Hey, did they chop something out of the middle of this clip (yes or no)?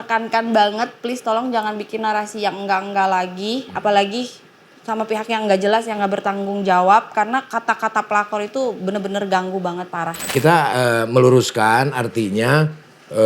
yes